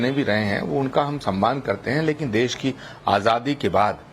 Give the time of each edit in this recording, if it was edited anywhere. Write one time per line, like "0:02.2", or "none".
0:01.9